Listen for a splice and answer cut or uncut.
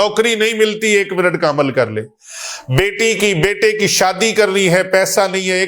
uncut